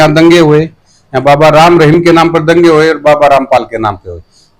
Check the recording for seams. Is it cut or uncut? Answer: uncut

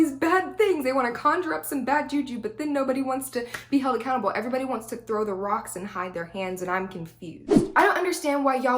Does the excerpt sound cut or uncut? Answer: cut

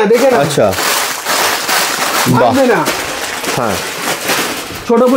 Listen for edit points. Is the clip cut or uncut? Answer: uncut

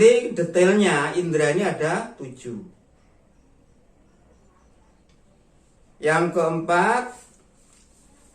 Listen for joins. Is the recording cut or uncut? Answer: cut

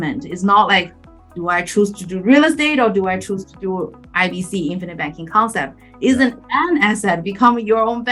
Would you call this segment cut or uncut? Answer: uncut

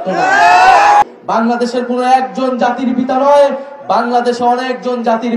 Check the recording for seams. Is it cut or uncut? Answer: cut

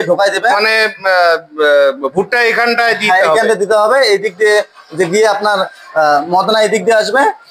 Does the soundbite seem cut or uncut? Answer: uncut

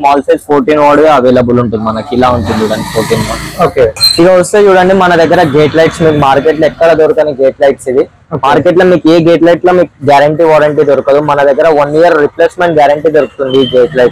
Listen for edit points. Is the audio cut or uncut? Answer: cut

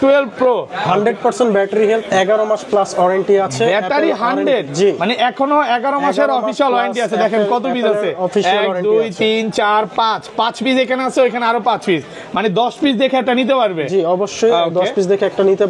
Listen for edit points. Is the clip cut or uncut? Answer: uncut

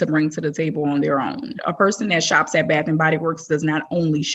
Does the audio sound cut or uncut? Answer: cut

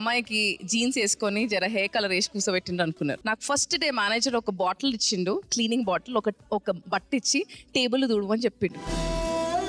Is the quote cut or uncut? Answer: cut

